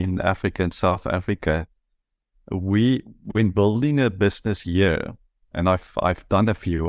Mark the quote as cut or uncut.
uncut